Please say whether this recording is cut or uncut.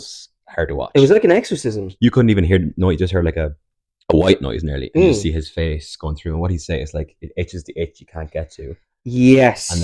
uncut